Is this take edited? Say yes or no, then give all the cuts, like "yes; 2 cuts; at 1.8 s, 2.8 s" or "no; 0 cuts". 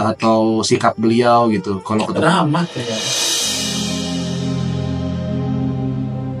no; 0 cuts